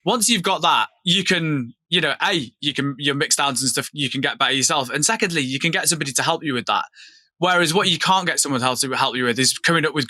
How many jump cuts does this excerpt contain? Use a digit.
2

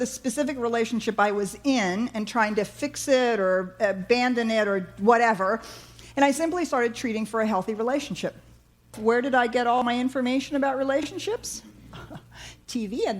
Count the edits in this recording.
1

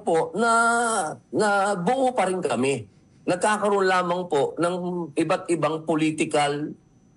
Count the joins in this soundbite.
1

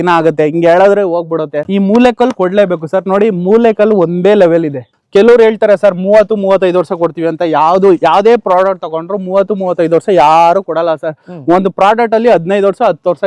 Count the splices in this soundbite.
2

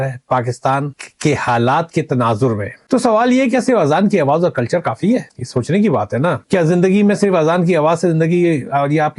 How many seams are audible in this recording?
1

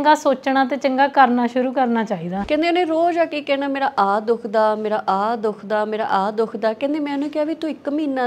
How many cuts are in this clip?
1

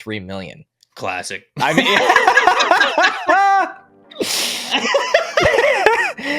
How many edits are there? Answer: 0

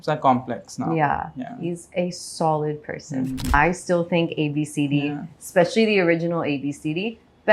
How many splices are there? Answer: 1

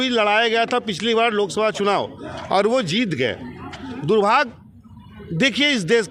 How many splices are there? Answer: 0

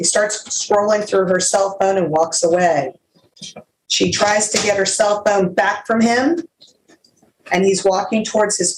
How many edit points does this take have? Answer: 0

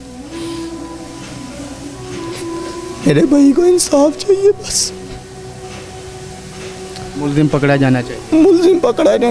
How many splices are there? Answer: 0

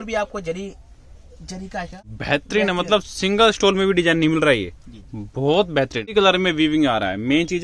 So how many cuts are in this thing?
2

